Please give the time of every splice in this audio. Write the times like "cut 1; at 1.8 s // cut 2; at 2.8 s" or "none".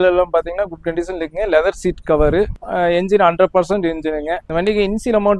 cut 1; at 2.6 s // cut 2; at 4.4 s

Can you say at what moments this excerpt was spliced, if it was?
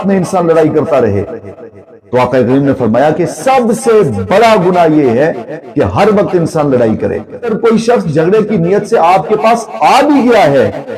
cut 1; at 7.5 s

